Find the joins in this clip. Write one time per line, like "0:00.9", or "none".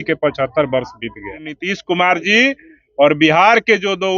0:01.7